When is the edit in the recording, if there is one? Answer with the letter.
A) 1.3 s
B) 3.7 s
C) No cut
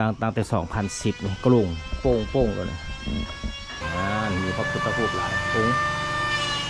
B